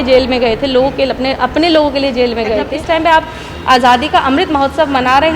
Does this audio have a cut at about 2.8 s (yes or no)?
yes